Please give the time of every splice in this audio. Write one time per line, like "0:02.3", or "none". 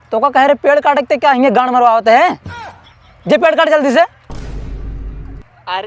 none